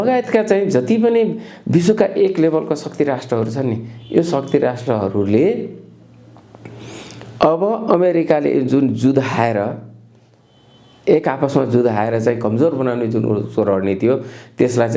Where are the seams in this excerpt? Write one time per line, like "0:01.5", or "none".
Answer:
none